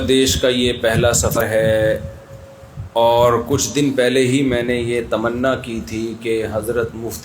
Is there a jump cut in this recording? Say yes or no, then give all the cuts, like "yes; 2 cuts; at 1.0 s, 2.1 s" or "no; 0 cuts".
yes; 1 cut; at 1.4 s